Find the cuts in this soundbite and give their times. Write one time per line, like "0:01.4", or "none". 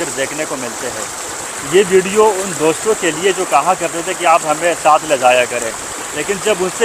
none